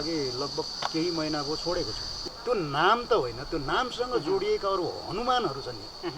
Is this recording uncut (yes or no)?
no